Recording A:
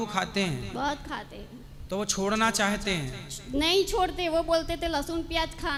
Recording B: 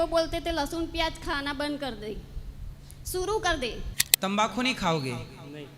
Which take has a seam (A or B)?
B